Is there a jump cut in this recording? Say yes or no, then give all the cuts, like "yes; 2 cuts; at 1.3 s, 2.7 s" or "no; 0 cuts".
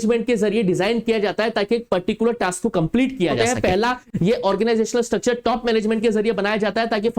yes; 1 cut; at 3.4 s